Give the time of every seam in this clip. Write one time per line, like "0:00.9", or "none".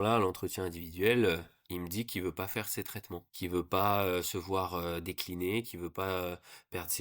0:03.2